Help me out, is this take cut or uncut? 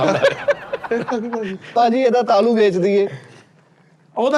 cut